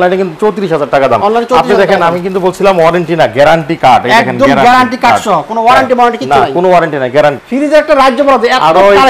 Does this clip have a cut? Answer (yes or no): yes